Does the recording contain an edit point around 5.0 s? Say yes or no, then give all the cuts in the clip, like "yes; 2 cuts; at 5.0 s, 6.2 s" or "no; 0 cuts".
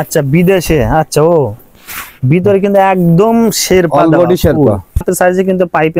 yes; 1 cut; at 5.0 s